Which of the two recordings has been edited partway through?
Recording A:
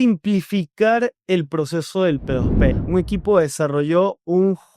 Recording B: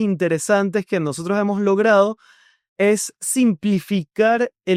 A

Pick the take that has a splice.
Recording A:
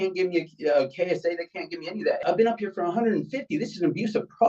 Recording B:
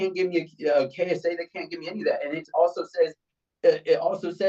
A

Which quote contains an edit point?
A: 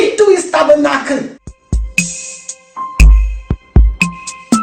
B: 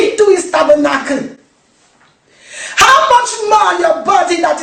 A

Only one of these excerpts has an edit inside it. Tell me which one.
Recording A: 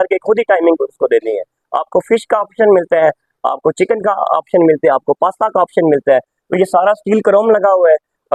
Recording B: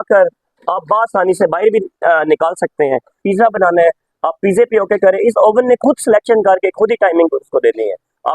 B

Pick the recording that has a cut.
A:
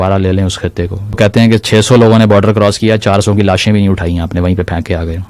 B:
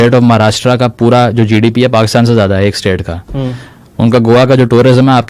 A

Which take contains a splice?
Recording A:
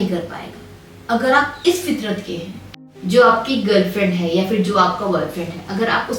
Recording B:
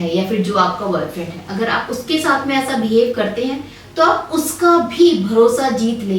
A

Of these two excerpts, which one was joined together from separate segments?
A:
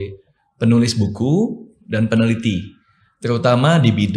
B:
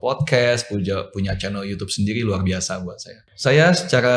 B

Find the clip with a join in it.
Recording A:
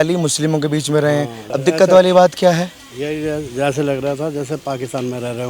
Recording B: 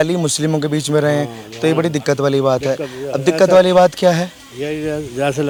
A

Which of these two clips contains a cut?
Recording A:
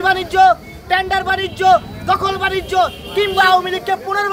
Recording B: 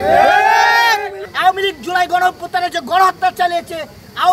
B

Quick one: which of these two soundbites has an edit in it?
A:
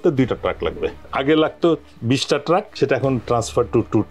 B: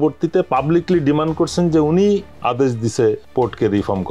A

